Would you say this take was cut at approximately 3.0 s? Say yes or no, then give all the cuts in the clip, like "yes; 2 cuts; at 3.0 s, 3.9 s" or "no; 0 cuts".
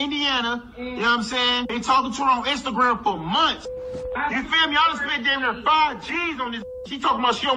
no; 1 cut; at 1.7 s